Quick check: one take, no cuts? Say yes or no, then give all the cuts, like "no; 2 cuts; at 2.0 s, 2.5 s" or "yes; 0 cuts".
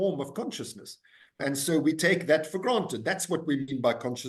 no; 1 cut; at 1.4 s